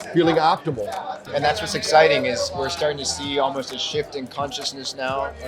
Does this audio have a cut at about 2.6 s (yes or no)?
no